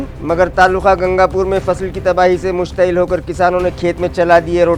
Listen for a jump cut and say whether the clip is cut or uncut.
uncut